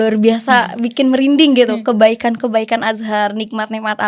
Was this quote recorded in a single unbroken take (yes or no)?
yes